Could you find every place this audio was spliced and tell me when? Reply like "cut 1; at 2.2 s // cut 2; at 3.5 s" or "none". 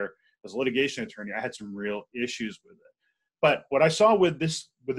none